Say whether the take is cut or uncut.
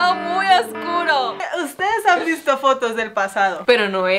cut